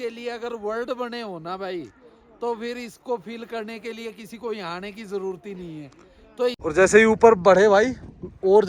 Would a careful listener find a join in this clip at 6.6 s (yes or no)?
yes